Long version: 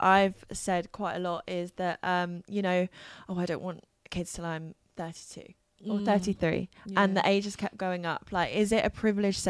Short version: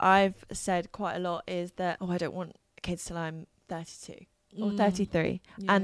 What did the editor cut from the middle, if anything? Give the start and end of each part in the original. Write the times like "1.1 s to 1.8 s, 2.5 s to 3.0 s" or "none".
2.0 s to 3.3 s